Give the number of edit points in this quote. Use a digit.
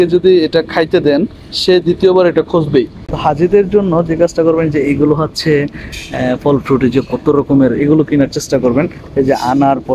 1